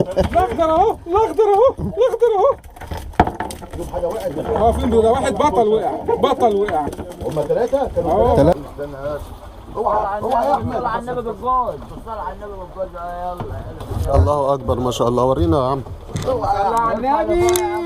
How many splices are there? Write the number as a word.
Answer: one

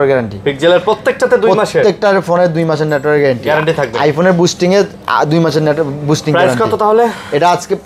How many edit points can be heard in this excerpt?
zero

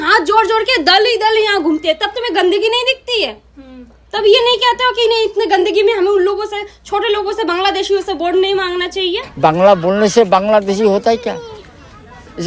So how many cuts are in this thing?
one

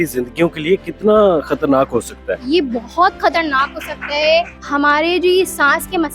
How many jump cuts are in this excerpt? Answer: one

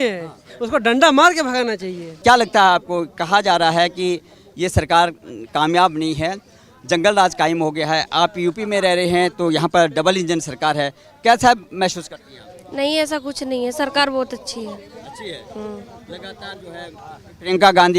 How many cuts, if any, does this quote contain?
zero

